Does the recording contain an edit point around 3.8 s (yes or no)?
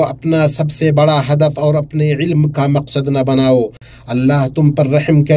yes